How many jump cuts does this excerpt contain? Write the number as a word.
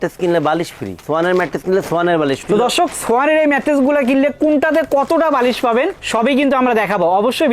two